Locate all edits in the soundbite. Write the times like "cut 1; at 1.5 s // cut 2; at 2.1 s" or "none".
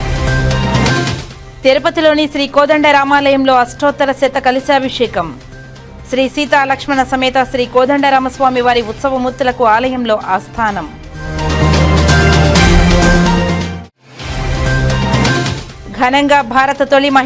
cut 1; at 1.2 s